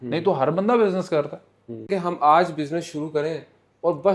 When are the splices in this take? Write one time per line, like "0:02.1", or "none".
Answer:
0:01.9